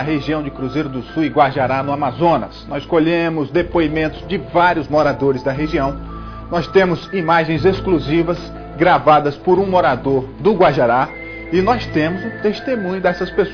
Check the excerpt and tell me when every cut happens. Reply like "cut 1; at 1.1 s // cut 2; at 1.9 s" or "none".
none